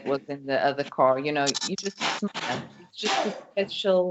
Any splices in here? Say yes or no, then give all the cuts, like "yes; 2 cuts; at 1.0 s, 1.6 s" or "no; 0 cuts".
no; 0 cuts